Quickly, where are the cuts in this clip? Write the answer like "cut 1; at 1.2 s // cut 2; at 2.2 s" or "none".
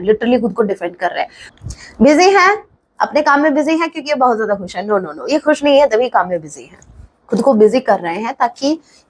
cut 1; at 1.4 s